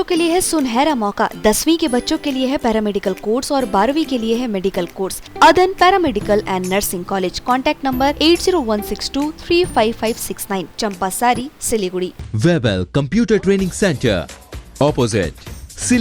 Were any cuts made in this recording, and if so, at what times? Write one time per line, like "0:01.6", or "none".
0:05.3
0:12.2